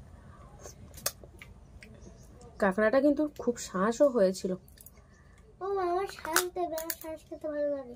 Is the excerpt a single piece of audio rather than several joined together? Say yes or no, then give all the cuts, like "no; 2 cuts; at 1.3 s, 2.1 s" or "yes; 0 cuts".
yes; 0 cuts